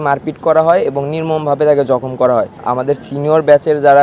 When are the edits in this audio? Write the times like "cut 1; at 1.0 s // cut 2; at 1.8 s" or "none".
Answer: cut 1; at 2.6 s